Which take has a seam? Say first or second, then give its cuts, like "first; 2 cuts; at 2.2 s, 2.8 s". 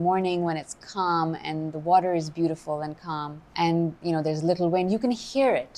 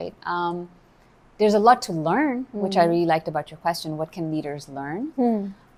first; 1 cut; at 3.4 s